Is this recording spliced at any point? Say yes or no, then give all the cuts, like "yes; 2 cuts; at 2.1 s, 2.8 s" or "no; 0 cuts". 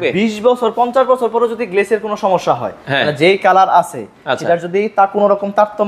no; 0 cuts